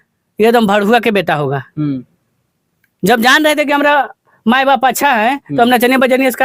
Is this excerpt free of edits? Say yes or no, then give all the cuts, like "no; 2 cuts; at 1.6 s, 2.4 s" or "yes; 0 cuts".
yes; 0 cuts